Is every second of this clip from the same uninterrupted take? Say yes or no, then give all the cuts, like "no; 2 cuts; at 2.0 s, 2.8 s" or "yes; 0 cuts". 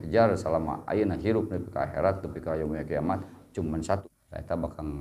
no; 1 cut; at 4.0 s